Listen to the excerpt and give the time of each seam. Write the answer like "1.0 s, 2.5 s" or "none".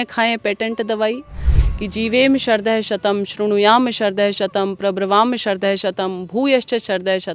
1.5 s